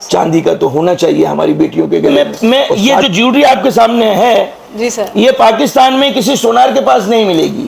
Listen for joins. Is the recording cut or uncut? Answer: cut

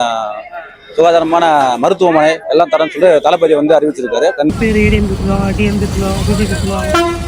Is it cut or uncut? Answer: cut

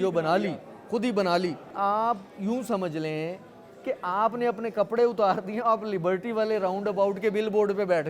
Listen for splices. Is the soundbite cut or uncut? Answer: cut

